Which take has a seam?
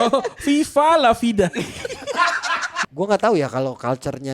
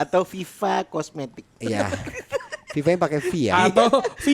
first; 1 cut; at 2.7 s

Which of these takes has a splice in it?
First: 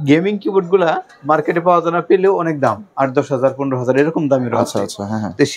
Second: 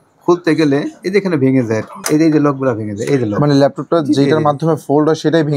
second; 1 cut; at 2.0 s

